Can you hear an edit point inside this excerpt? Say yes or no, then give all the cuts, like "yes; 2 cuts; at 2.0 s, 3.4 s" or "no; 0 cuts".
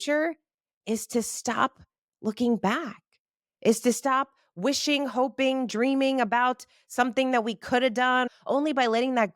yes; 1 cut; at 8.3 s